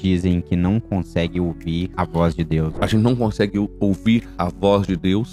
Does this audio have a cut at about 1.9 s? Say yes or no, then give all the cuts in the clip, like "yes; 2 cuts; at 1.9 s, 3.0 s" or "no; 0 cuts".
yes; 3 cuts; at 1.9 s, 2.7 s, 4.4 s